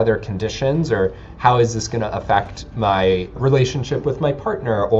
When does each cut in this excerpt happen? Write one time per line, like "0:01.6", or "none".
0:03.4